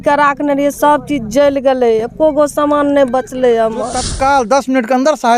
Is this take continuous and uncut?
no; 1 cut; at 4.0 s

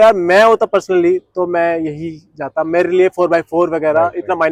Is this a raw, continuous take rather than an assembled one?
yes; 0 cuts

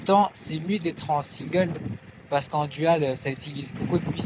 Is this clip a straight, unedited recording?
yes; 0 cuts

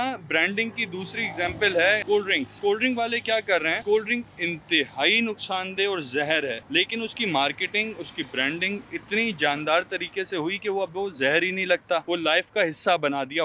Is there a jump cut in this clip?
yes; 4 cuts; at 2.0 s, 3.8 s, 6.6 s, 12.0 s

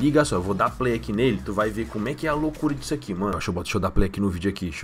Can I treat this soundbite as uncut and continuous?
no; 1 cut; at 3.4 s

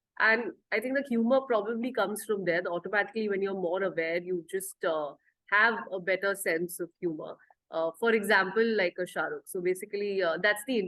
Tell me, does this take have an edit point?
no; 0 cuts

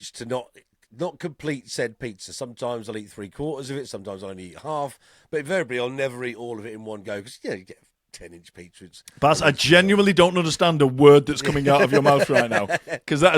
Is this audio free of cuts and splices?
yes; 0 cuts

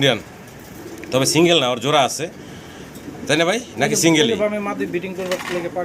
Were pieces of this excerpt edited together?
no; 0 cuts

